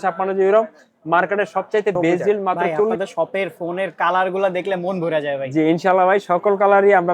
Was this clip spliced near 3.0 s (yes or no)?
yes